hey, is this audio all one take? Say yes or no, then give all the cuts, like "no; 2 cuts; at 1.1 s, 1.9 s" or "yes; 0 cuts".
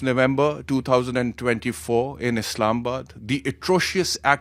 yes; 0 cuts